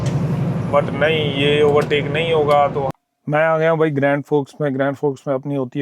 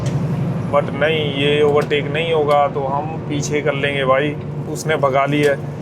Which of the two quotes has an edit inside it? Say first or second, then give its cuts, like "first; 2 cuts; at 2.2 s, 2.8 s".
first; 1 cut; at 2.9 s